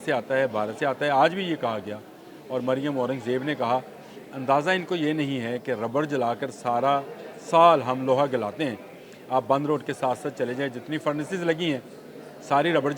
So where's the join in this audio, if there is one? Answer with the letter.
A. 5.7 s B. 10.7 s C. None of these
C